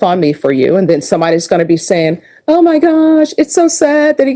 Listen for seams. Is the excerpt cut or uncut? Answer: uncut